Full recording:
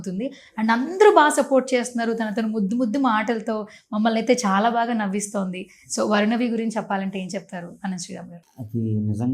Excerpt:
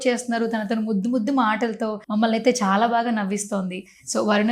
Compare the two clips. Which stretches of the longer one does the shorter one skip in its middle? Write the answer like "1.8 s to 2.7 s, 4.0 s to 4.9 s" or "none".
3.7 s to 3.8 s